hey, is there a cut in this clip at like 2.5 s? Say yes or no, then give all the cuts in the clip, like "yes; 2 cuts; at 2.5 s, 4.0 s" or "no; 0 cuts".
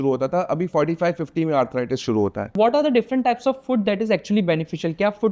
yes; 1 cut; at 2.5 s